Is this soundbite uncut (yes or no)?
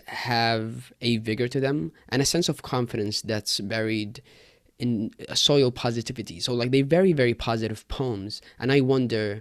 yes